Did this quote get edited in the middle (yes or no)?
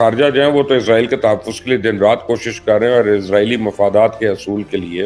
no